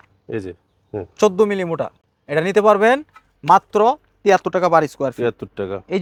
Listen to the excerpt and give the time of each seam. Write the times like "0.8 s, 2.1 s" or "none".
none